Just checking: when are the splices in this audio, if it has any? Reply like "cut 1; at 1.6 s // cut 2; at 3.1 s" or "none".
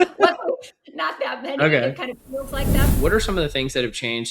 cut 1; at 2.9 s

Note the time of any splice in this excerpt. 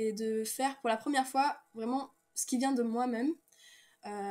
none

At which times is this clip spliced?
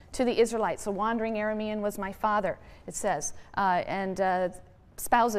none

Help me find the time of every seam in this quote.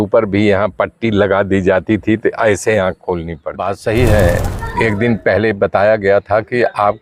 cut 1; at 3.4 s

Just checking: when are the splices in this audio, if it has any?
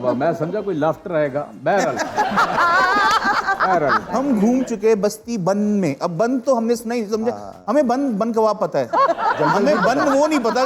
cut 1; at 4.1 s // cut 2; at 8.9 s

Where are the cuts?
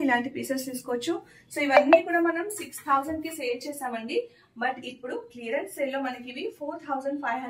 none

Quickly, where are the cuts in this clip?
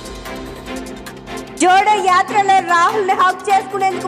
cut 1; at 1.5 s

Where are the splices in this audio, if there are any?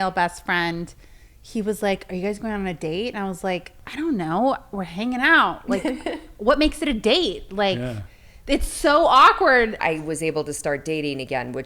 cut 1; at 3.8 s // cut 2; at 9.8 s

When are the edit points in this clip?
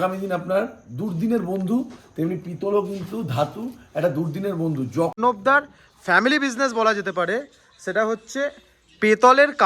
cut 1; at 5.2 s

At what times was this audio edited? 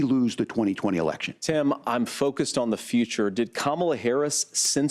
cut 1; at 1.3 s

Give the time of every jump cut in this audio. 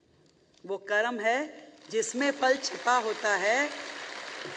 none

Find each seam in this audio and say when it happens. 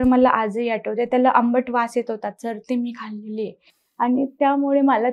none

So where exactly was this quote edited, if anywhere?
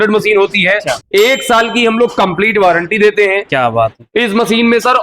cut 1; at 1.0 s

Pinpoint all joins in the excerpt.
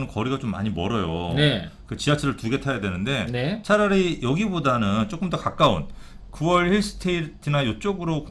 none

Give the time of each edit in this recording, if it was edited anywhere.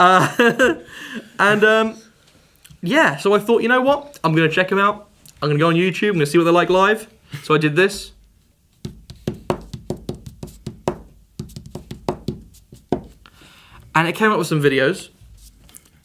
none

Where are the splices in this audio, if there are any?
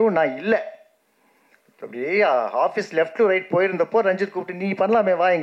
none

